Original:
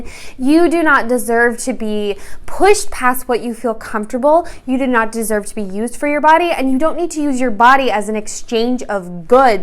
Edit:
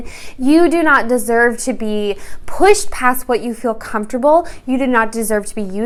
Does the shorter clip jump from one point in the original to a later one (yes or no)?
no